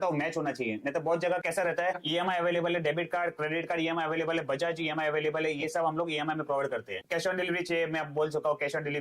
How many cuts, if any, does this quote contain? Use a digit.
1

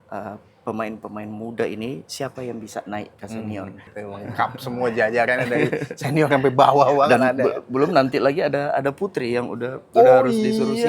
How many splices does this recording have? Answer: 1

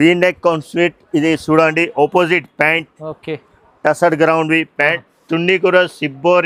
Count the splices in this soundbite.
0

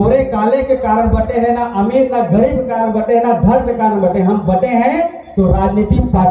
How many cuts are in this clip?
0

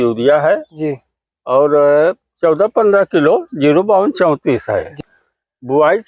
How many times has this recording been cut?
1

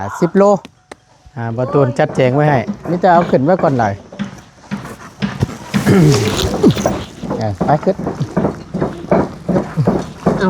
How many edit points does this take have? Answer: 1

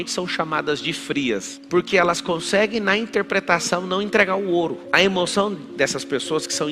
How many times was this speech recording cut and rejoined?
1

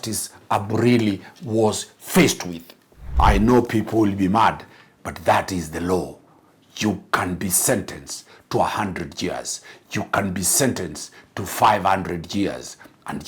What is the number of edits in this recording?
1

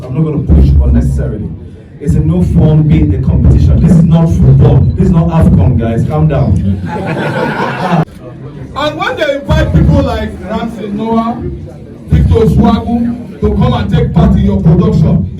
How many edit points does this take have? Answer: 1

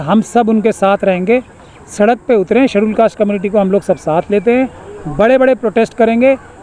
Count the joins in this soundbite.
0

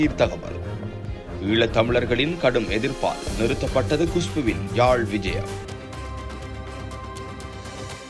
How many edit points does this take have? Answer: 1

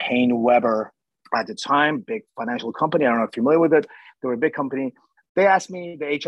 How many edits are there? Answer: 1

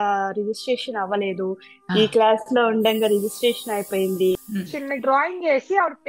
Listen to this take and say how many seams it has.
1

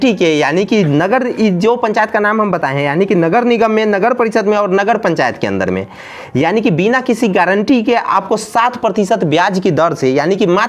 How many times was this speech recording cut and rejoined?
0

